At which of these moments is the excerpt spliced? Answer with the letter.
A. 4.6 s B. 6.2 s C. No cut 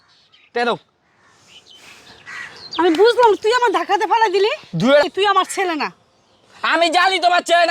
A